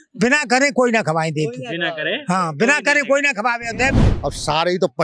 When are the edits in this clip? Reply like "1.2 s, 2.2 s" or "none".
3.9 s